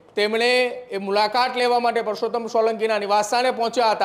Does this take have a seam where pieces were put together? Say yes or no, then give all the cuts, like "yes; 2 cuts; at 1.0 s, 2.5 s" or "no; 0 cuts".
no; 0 cuts